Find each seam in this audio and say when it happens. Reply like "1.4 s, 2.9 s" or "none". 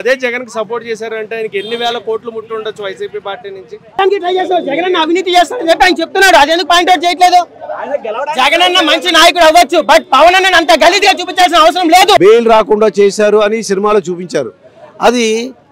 4.0 s, 12.2 s